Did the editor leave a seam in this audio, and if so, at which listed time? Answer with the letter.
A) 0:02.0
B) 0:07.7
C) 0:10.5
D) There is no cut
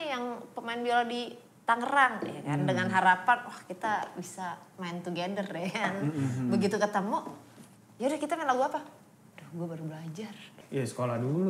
C